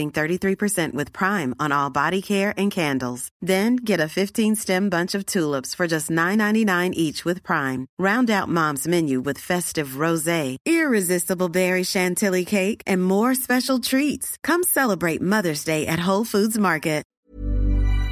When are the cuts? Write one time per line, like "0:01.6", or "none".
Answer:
0:17.1